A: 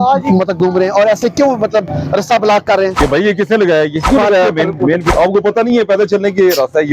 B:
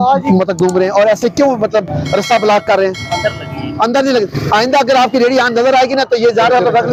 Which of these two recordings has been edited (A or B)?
A